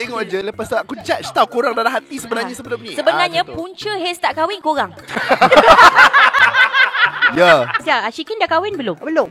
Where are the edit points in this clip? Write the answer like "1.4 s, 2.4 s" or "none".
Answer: 7.7 s